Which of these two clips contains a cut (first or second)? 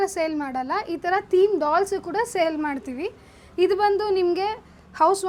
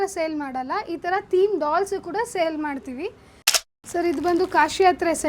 second